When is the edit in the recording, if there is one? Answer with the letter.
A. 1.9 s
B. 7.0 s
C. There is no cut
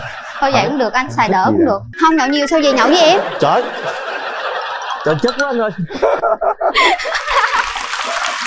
A